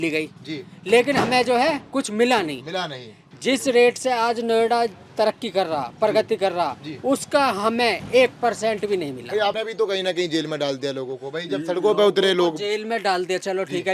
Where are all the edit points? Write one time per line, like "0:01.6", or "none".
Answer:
0:09.6